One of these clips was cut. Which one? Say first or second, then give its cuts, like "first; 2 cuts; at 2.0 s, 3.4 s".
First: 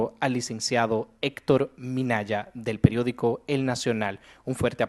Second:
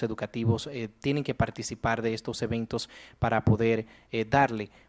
second; 1 cut; at 1.6 s